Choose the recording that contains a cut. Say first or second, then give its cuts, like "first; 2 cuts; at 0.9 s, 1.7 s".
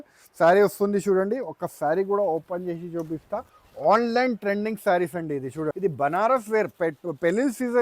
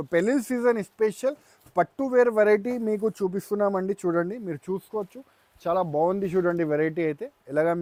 first; 1 cut; at 5.7 s